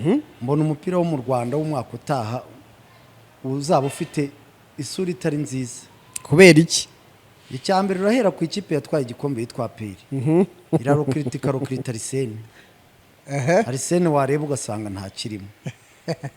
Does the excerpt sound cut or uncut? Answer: uncut